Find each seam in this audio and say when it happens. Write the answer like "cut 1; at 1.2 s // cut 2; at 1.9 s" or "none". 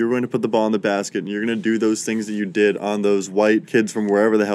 cut 1; at 3.4 s